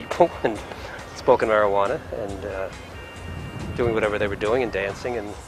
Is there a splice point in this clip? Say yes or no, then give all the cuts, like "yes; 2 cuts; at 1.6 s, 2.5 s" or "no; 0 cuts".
yes; 1 cut; at 3.6 s